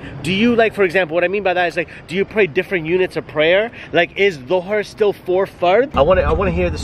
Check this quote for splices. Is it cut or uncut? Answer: cut